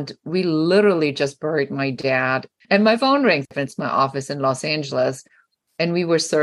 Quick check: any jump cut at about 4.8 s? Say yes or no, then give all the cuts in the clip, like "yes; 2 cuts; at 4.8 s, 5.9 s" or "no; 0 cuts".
no; 2 cuts; at 2.5 s, 3.5 s